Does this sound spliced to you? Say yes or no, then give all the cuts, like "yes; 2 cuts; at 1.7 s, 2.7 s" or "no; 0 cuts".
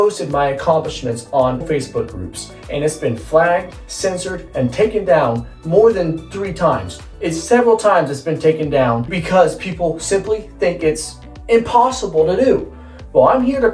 no; 0 cuts